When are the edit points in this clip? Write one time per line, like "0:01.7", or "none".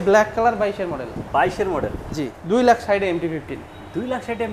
0:02.3